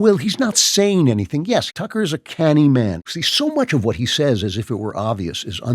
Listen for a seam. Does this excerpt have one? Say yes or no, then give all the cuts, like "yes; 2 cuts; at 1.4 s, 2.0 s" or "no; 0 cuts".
yes; 2 cuts; at 1.8 s, 3.1 s